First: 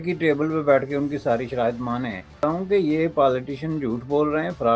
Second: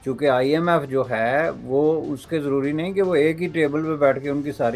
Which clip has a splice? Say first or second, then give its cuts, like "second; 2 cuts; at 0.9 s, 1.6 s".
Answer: first; 1 cut; at 2.4 s